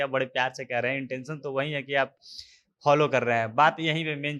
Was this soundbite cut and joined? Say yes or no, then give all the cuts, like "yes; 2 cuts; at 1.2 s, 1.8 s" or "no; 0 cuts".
no; 0 cuts